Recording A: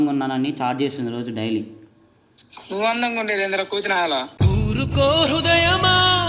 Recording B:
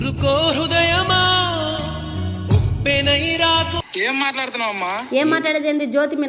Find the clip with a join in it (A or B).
B